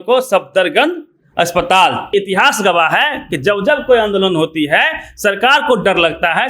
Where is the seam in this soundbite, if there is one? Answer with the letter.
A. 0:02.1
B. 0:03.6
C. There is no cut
A